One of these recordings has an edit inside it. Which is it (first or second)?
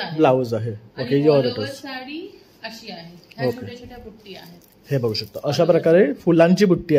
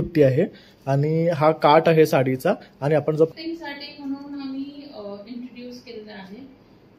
second